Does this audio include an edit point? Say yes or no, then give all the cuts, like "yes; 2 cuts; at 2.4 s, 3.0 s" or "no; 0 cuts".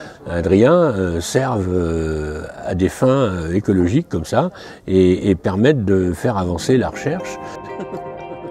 yes; 1 cut; at 7.3 s